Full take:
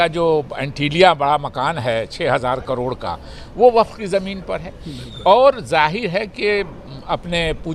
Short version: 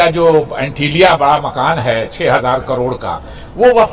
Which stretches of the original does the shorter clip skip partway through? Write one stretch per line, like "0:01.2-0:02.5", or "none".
none